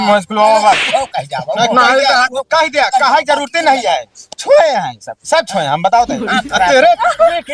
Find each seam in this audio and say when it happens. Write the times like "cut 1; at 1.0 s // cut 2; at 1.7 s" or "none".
none